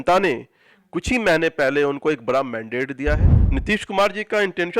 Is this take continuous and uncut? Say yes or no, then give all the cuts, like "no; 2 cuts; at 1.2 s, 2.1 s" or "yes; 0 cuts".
no; 1 cut; at 3.3 s